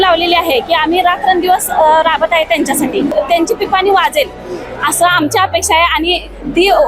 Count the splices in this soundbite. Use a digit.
1